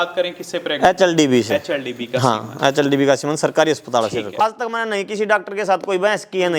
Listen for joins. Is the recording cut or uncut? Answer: cut